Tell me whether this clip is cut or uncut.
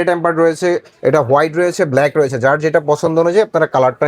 uncut